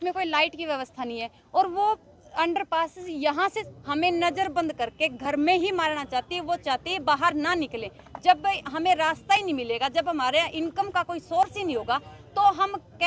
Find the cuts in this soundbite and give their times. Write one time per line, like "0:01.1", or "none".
0:03.7